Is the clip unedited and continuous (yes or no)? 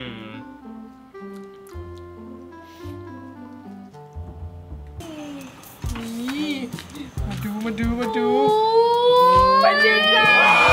no